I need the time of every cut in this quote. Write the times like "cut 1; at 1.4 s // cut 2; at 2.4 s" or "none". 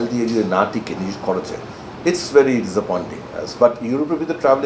none